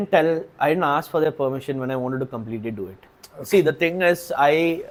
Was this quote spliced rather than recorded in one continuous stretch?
no; 0 cuts

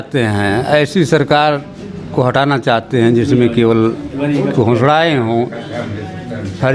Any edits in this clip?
no; 0 cuts

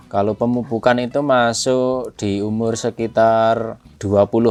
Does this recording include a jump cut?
no; 0 cuts

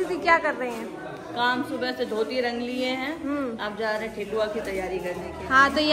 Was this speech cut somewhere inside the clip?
no; 0 cuts

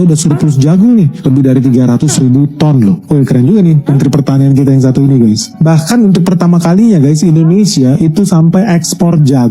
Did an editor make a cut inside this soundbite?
no; 0 cuts

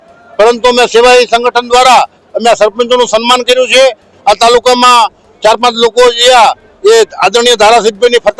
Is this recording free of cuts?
no; 1 cut; at 4.1 s

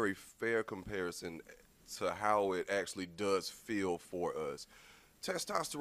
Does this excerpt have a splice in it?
no; 0 cuts

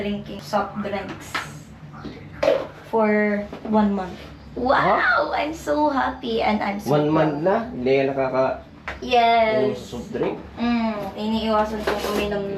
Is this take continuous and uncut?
yes; 0 cuts

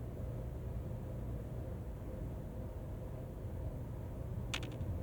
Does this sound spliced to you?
no; 0 cuts

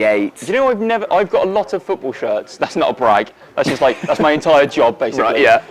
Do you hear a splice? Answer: no; 0 cuts

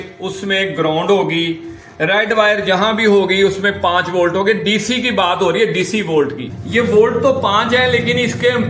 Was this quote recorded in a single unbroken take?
no; 1 cut; at 6.5 s

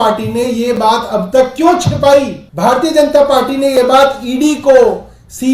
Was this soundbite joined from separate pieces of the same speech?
yes; 1 cut; at 2.4 s

